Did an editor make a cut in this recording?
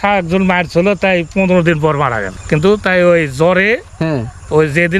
yes; 1 cut; at 2.3 s

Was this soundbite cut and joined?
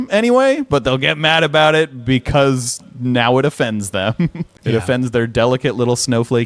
no; 0 cuts

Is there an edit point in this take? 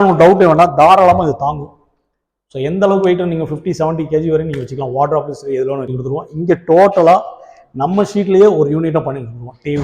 yes; 1 cut; at 6.0 s

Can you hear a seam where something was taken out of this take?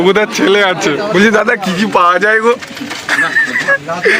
yes; 1 cut; at 1.1 s

